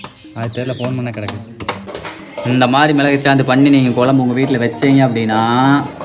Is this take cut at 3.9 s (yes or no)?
no